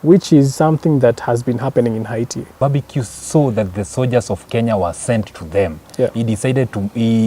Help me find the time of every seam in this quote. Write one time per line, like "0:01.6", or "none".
0:02.6